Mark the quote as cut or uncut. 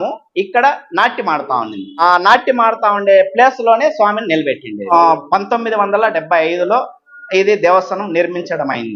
uncut